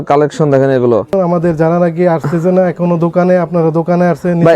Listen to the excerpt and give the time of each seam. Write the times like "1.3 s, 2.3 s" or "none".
1.1 s